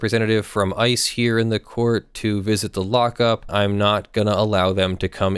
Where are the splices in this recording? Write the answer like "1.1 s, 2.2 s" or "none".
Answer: 3.5 s